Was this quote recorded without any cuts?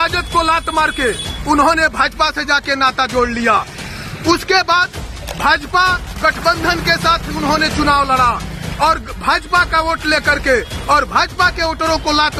yes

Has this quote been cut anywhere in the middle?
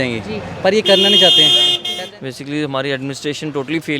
yes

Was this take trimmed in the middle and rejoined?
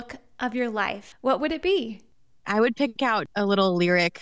yes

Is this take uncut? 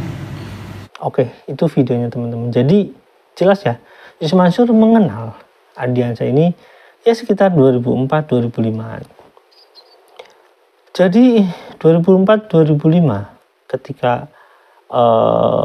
no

